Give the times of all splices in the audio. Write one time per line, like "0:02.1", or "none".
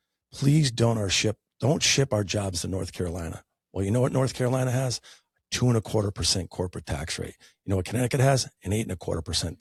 none